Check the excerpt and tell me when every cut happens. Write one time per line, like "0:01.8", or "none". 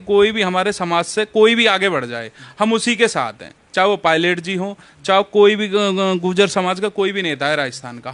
none